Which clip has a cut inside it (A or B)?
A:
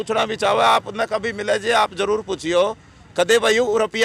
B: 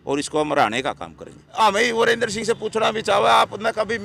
B